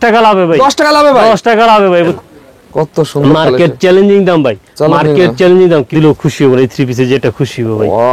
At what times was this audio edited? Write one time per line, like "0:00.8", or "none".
0:02.1
0:05.9